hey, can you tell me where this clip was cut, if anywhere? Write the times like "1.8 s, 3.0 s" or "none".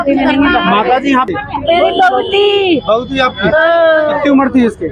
1.3 s